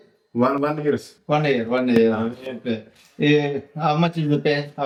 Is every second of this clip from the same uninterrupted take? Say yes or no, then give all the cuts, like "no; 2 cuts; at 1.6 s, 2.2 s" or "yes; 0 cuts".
yes; 0 cuts